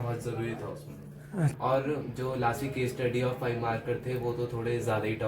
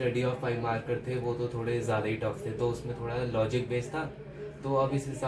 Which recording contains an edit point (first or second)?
first